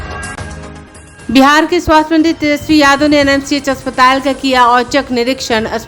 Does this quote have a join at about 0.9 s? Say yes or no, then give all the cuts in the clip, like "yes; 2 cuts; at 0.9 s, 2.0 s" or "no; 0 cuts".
yes; 1 cut; at 0.9 s